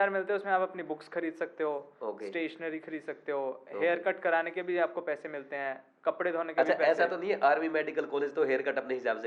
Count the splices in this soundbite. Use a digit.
0